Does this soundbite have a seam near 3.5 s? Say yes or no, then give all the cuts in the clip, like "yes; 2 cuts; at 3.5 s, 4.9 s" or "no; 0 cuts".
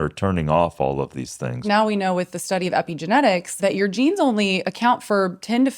yes; 2 cuts; at 1.6 s, 3.5 s